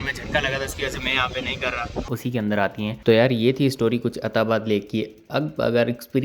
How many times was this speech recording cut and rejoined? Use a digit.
1